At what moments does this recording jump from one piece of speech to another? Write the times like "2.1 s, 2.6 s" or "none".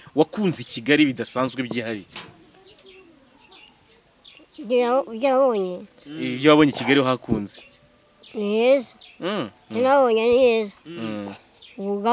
none